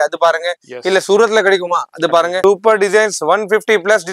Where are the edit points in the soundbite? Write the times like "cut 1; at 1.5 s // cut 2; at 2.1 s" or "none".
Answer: cut 1; at 2.3 s